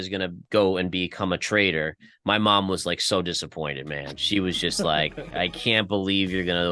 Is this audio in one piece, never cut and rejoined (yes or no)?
yes